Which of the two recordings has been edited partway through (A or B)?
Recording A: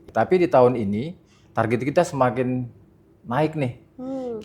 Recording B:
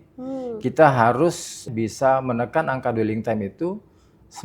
B